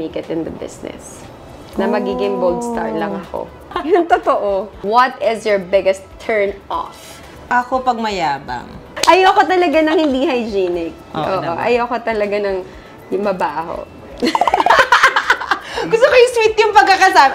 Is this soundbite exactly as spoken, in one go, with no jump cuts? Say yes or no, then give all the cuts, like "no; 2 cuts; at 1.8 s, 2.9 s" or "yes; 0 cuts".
no; 3 cuts; at 3.7 s, 4.8 s, 8.9 s